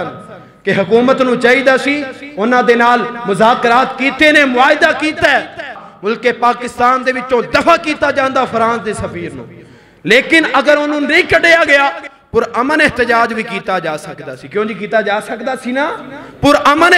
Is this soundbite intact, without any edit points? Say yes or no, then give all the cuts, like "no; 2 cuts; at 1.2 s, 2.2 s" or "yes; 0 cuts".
no; 1 cut; at 5.8 s